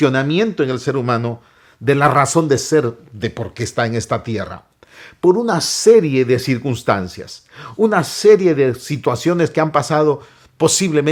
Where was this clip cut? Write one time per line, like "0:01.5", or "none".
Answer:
none